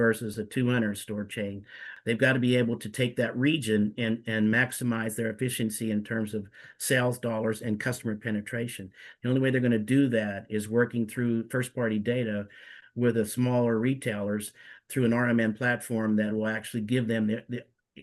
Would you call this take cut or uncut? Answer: cut